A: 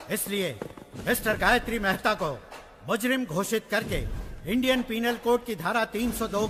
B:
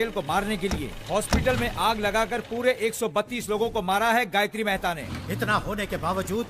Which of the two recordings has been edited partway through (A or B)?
B